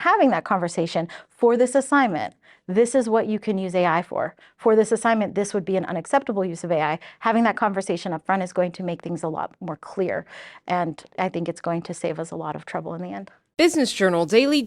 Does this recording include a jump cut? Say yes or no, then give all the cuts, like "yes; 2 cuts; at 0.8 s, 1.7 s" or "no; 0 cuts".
yes; 1 cut; at 13.3 s